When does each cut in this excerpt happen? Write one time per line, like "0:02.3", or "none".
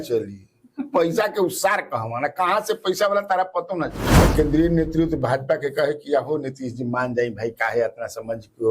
0:04.0